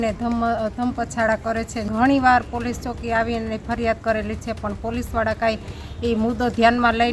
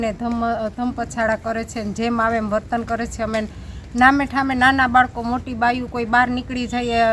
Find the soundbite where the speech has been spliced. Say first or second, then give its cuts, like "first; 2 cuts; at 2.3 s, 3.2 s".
first; 1 cut; at 1.8 s